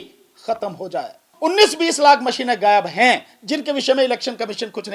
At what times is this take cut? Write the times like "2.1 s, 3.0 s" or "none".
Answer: 1.3 s